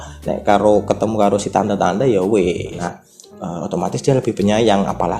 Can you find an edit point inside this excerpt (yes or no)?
yes